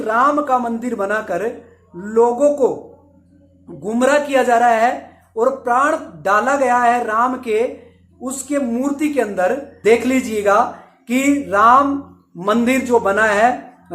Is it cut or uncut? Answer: cut